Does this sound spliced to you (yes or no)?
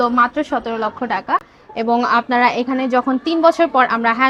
no